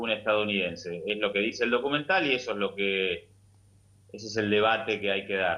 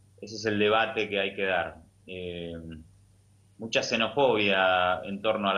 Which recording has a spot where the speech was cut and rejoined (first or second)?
first